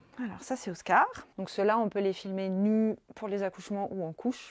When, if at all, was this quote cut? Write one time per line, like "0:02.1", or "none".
0:01.2